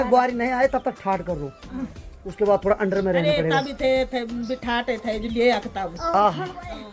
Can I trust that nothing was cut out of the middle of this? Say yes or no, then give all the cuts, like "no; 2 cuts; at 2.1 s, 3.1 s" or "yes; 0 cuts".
yes; 0 cuts